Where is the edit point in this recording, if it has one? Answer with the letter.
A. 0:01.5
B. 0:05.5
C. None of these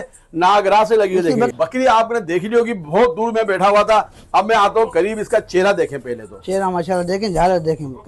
A